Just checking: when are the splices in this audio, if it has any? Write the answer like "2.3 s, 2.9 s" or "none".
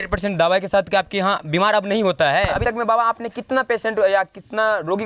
2.6 s